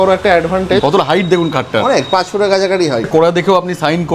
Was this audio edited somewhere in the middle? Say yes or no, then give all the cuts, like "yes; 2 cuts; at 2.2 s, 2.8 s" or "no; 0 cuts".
yes; 2 cuts; at 0.8 s, 3.1 s